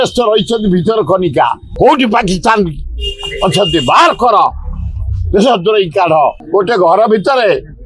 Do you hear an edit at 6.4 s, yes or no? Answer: yes